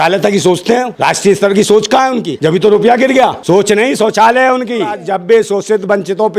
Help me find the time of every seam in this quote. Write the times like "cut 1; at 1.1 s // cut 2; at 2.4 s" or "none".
cut 1; at 0.9 s // cut 2; at 2.3 s // cut 3; at 3.4 s // cut 4; at 5.0 s